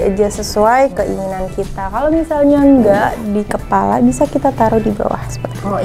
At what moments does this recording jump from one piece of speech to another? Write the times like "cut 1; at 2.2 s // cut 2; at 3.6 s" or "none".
none